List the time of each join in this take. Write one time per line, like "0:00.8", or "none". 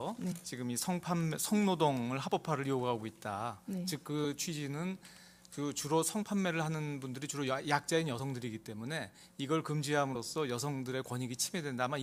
none